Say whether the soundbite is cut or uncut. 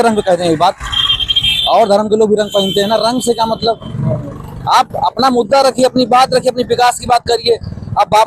uncut